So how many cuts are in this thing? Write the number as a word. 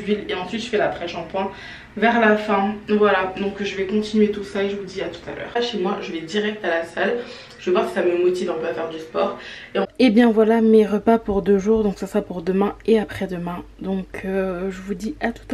two